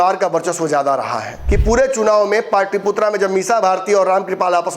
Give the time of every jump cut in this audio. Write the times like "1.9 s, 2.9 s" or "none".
1.3 s